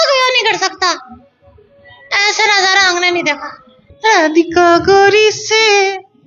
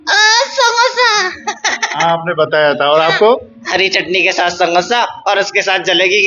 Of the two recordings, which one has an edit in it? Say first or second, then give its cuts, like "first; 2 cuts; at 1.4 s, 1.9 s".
first; 1 cut; at 3.8 s